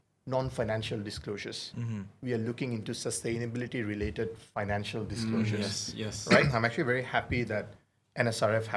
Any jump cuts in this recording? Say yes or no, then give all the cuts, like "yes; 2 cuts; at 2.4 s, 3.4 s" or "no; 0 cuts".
yes; 1 cut; at 6.4 s